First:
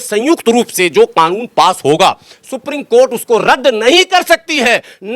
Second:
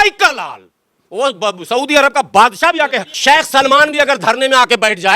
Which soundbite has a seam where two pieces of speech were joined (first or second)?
second